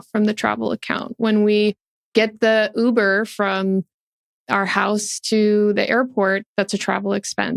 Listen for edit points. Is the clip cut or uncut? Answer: uncut